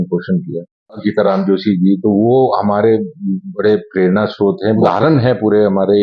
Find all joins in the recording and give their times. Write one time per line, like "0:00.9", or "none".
0:01.0
0:04.8